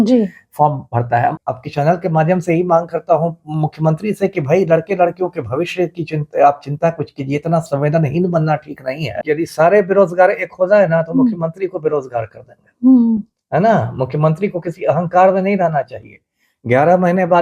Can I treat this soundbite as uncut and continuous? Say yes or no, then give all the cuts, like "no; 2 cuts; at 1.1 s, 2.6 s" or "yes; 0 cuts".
no; 2 cuts; at 1.4 s, 9.2 s